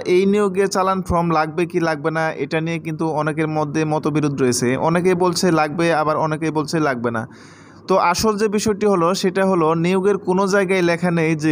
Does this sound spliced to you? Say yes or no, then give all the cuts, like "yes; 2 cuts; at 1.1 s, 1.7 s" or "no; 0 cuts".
no; 0 cuts